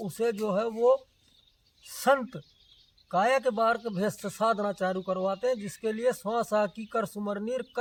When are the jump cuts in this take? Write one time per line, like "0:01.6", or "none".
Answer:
none